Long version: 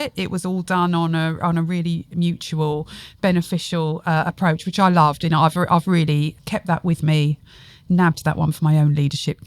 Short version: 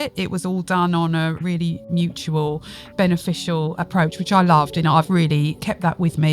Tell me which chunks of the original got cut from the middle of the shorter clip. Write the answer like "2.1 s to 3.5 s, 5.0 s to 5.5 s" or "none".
1.4 s to 1.6 s, 4.0 s to 4.3 s, 5.7 s to 6.0 s